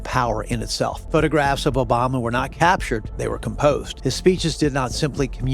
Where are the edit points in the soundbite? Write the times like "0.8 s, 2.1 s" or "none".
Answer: 1.0 s, 3.1 s, 3.9 s